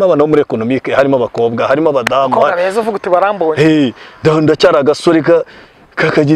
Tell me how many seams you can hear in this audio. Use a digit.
0